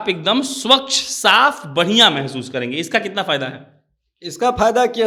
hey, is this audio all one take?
yes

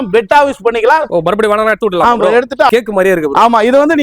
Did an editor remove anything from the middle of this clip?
yes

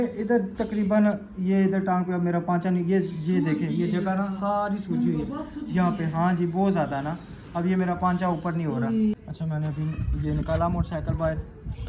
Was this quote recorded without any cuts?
no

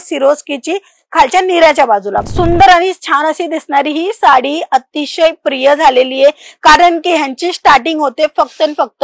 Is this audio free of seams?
no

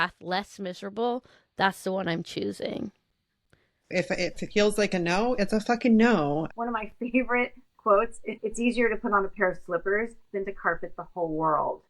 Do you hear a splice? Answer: yes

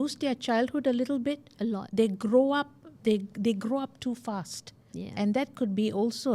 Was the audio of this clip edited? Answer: no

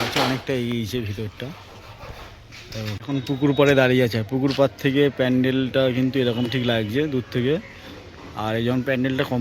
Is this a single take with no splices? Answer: no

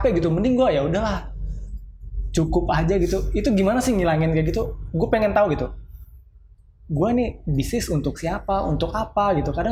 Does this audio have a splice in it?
no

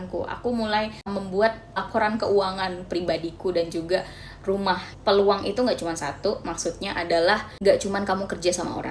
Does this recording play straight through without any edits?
no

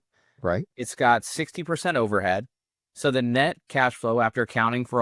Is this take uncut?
yes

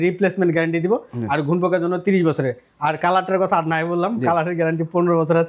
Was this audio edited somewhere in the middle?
no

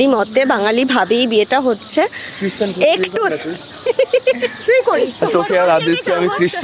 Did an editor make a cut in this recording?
no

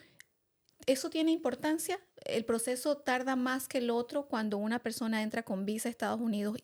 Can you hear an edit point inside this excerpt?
no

